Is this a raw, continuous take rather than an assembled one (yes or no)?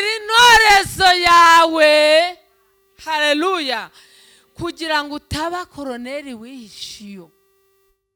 yes